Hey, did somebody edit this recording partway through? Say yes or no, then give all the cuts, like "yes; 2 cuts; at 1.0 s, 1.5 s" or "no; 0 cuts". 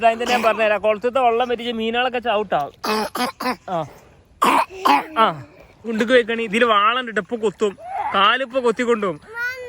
yes; 1 cut; at 5.8 s